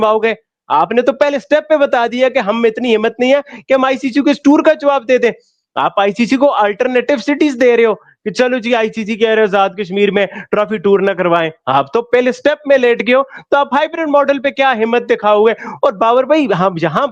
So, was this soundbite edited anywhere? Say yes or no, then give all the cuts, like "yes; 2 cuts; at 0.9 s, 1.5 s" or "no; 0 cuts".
no; 0 cuts